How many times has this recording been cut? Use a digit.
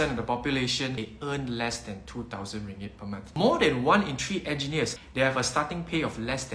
3